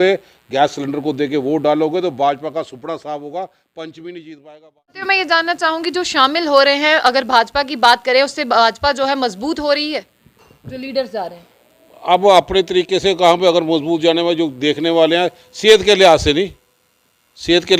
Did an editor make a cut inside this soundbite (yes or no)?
yes